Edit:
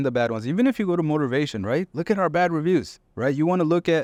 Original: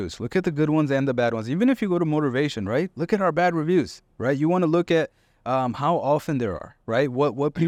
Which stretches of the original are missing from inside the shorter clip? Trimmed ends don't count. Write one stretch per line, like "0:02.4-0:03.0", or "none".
none